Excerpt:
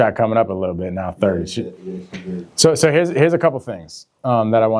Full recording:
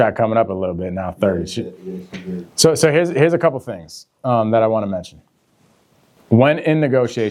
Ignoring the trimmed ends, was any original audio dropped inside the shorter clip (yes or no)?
no